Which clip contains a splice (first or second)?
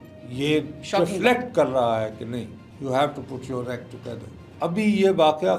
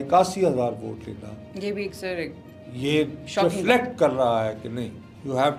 first